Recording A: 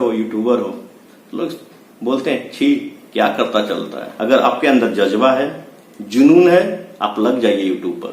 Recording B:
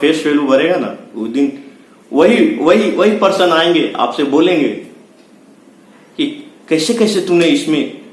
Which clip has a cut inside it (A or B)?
A